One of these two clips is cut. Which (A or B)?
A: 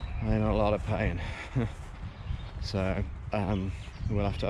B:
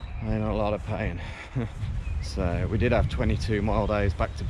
B